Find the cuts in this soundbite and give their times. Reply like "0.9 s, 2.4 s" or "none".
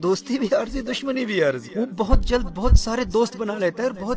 1.6 s